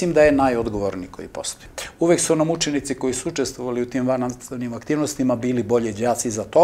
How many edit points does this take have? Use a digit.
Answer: 1